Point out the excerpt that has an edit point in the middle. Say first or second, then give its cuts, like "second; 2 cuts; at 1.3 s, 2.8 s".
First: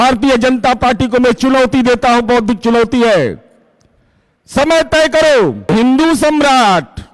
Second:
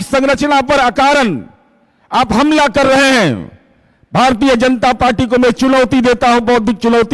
first; 1 cut; at 5.7 s